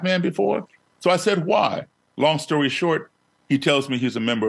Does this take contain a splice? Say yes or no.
no